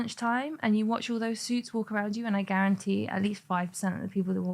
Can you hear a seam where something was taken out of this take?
no; 0 cuts

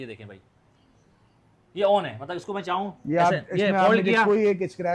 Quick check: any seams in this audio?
no; 0 cuts

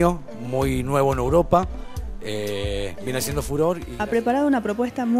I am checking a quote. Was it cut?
yes; 1 cut; at 3.9 s

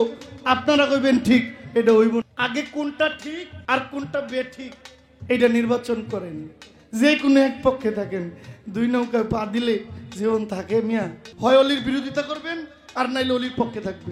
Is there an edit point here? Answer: yes; 3 cuts; at 2.3 s, 3.5 s, 11.2 s

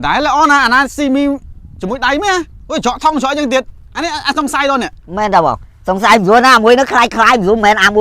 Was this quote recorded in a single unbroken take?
yes; 0 cuts

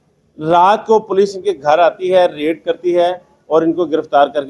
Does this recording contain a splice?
no; 0 cuts

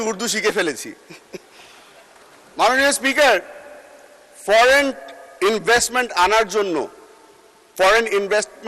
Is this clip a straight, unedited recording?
yes; 0 cuts

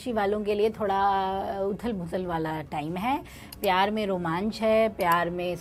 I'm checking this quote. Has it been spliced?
no; 0 cuts

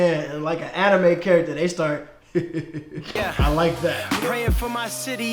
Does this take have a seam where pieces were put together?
yes; 1 cut; at 4.0 s

